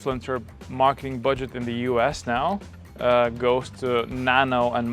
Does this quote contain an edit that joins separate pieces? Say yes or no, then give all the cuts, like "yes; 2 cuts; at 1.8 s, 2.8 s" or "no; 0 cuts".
no; 0 cuts